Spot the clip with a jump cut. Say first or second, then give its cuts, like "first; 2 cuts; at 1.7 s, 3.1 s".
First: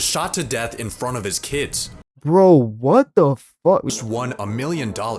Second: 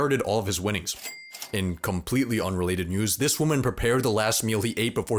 first; 1 cut; at 3.9 s